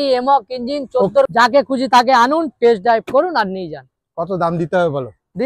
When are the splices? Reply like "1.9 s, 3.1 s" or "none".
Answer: 1.3 s